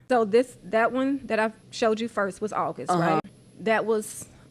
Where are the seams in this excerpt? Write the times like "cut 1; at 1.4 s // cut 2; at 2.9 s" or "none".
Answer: cut 1; at 1.6 s // cut 2; at 3.2 s